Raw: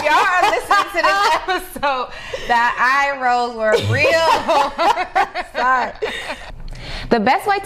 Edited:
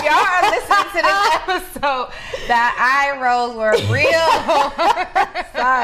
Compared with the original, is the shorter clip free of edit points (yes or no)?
yes